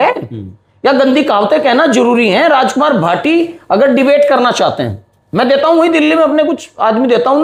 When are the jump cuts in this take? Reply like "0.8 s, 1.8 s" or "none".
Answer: none